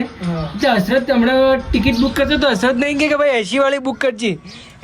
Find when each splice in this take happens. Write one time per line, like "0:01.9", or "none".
none